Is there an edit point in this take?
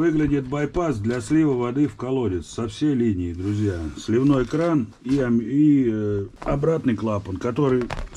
yes; 1 cut; at 6.3 s

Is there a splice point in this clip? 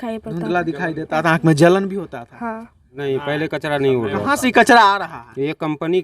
yes; 1 cut; at 2.9 s

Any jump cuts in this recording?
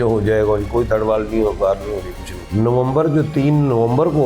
yes; 1 cut; at 2.4 s

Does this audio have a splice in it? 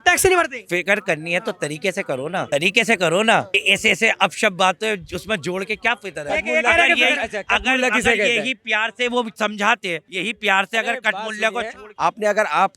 yes; 4 cuts; at 2.5 s, 3.6 s, 10.1 s, 11.8 s

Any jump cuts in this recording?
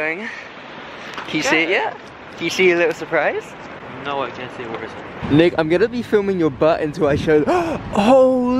yes; 1 cut; at 5.1 s

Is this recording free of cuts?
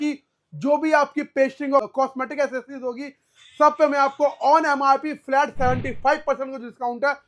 yes; 0 cuts

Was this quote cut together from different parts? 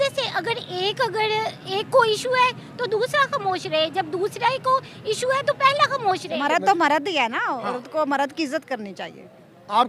yes; 1 cut; at 6.3 s

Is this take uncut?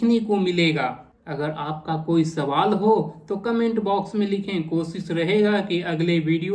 yes; 0 cuts

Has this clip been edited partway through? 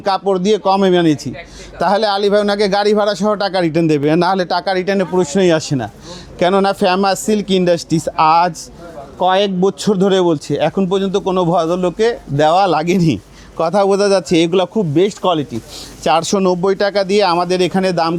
no; 0 cuts

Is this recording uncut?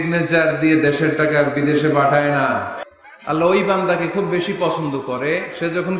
no; 1 cut; at 2.8 s

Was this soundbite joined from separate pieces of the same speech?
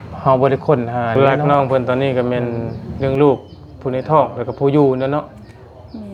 yes; 1 cut; at 1.2 s

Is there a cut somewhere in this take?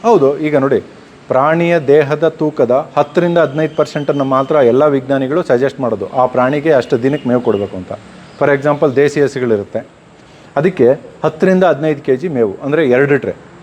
no; 0 cuts

